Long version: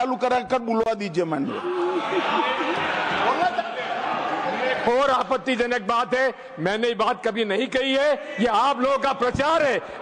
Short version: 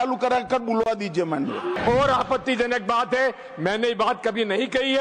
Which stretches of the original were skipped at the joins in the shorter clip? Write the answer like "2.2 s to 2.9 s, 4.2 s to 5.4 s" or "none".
1.8 s to 4.8 s